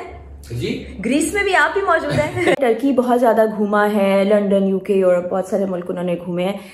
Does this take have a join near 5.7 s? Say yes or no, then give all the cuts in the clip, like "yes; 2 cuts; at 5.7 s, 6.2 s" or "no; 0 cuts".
no; 1 cut; at 2.6 s